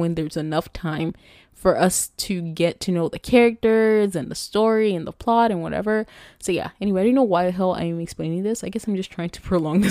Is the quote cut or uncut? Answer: uncut